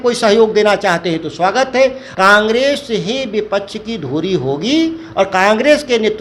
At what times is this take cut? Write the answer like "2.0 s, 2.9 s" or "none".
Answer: 2.0 s